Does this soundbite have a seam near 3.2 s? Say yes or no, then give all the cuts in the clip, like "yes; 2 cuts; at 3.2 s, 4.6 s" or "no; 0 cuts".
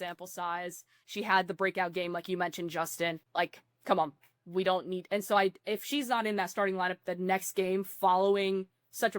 yes; 1 cut; at 3.2 s